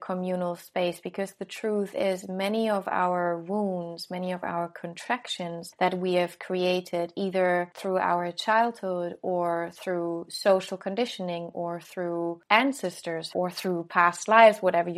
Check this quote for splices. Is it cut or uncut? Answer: cut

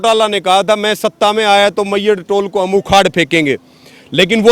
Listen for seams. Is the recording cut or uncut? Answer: uncut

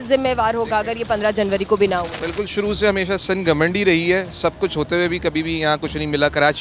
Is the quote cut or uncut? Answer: uncut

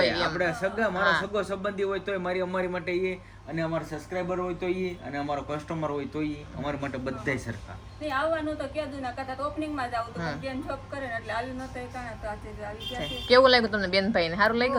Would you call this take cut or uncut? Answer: uncut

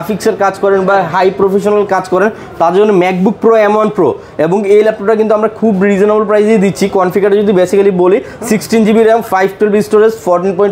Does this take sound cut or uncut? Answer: uncut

